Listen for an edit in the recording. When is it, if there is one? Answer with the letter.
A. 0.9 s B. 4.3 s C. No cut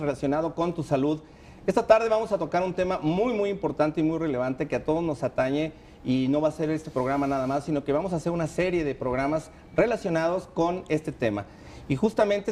A